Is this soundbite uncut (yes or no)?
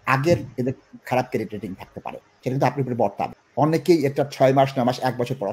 no